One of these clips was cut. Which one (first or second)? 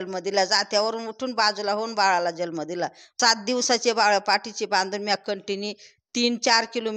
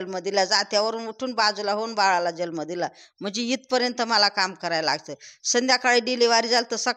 first